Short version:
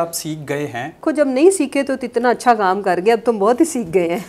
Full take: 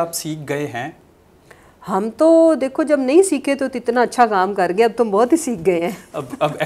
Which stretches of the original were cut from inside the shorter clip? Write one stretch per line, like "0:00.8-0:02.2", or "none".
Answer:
0:01.0-0:02.7